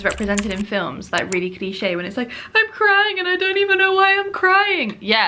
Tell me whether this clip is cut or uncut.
uncut